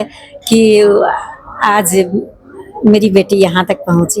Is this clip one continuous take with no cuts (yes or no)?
yes